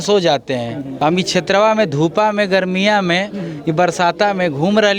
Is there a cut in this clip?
yes; 1 cut; at 0.9 s

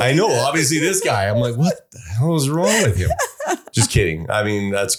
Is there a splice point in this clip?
no; 0 cuts

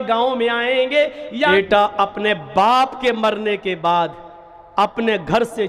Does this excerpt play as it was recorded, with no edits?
no; 1 cut; at 1.5 s

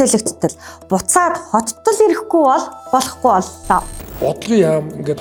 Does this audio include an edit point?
no; 0 cuts

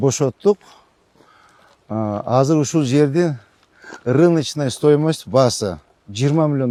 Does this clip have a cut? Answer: no; 0 cuts

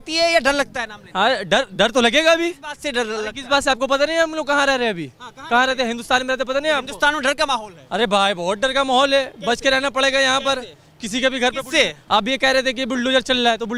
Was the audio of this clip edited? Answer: no; 0 cuts

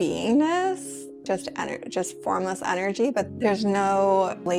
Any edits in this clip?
no; 0 cuts

